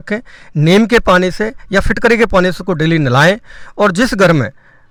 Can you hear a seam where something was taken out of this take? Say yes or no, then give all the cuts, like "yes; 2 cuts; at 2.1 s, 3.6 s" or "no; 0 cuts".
no; 0 cuts